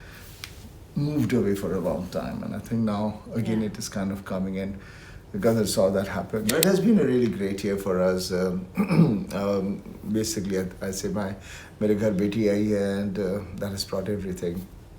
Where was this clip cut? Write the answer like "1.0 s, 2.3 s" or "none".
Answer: 6.5 s